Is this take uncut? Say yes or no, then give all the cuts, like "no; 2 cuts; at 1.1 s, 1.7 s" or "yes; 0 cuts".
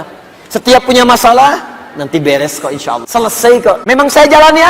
no; 2 cuts; at 3.0 s, 3.8 s